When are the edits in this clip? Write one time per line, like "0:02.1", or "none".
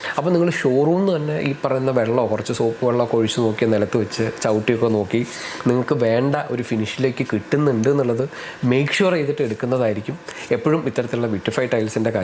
none